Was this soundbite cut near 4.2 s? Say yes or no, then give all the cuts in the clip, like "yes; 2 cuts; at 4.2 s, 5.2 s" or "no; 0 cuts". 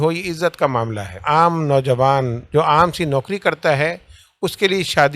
no; 2 cuts; at 1.1 s, 2.4 s